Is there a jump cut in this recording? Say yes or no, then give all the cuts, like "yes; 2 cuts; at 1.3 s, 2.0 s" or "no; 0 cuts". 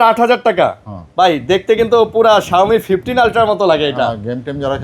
no; 0 cuts